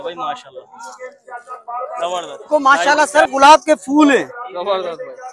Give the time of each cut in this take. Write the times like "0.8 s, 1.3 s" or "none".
2.5 s